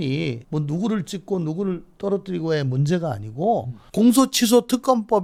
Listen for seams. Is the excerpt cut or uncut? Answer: uncut